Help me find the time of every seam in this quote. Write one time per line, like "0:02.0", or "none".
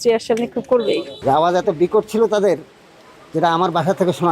0:01.2

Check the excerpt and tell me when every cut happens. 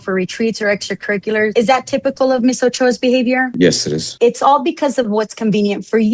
0:01.5
0:04.1

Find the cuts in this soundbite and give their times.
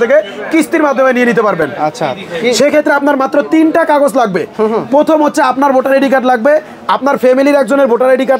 none

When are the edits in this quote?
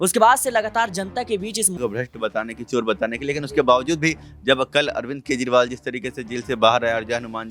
0:01.7

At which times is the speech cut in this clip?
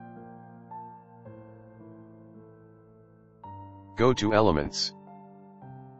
0:03.9
0:04.8

